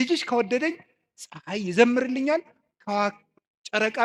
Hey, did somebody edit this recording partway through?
no; 0 cuts

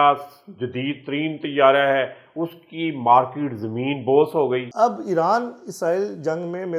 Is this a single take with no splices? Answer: no; 1 cut; at 4.7 s

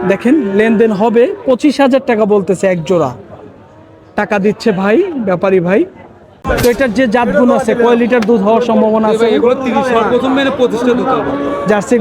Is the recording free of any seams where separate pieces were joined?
no; 1 cut; at 6.4 s

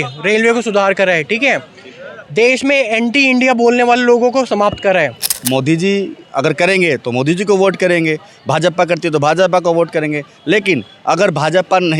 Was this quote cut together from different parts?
yes; 1 cut; at 5.4 s

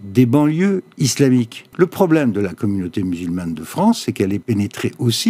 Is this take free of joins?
no; 2 cuts; at 1.6 s, 4.4 s

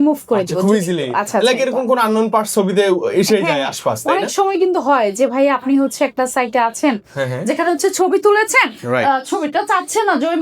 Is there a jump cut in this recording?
no; 0 cuts

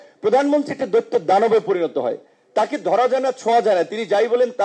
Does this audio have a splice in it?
no; 0 cuts

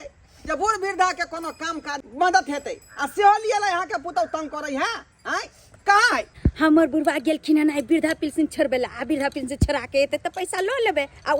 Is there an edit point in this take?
yes; 2 cuts; at 2.0 s, 6.4 s

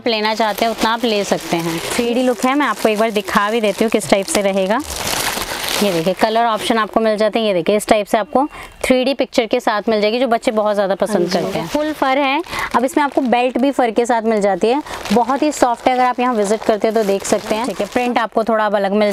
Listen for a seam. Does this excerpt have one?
yes; 4 cuts; at 1.8 s, 5.0 s, 11.6 s, 17.8 s

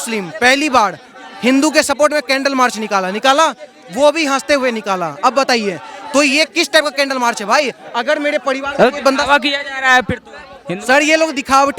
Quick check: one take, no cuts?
yes; 0 cuts

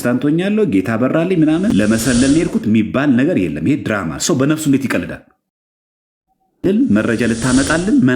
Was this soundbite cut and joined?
yes; 2 cuts; at 1.7 s, 6.6 s

